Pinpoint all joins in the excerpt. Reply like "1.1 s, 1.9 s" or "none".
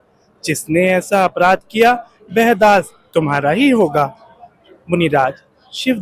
none